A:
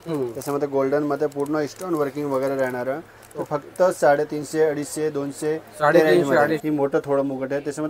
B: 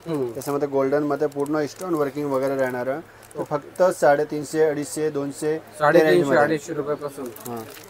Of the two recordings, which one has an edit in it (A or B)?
A